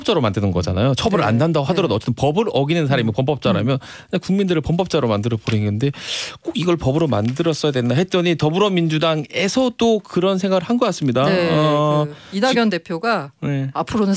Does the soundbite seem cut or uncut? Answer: uncut